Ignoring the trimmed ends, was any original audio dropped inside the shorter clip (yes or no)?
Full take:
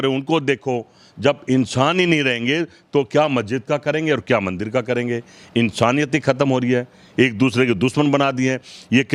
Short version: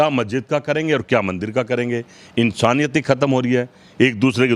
no